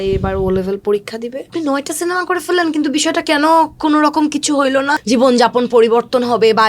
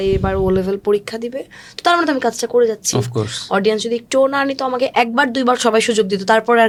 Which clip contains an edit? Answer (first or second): first